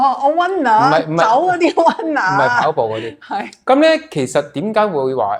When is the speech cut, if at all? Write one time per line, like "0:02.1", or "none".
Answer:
none